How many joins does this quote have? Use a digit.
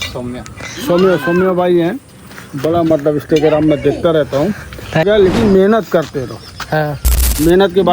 1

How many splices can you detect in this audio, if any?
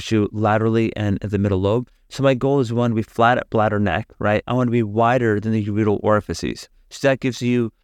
1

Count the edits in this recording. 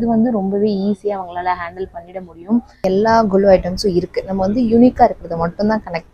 1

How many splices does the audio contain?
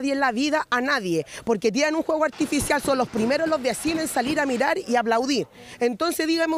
1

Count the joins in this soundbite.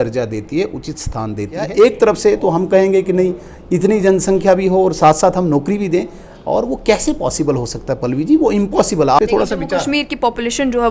2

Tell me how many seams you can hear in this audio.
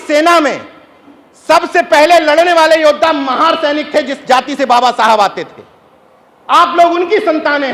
0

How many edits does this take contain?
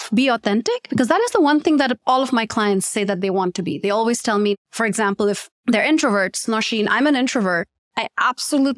1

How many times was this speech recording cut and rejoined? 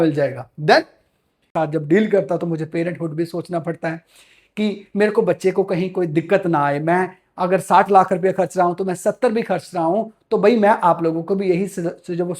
1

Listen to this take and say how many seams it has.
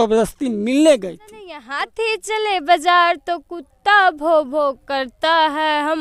1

